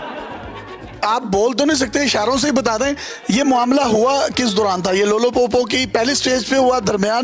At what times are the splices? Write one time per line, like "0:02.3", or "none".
0:00.9